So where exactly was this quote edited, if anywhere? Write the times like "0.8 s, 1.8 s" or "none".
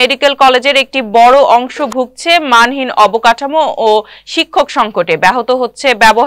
none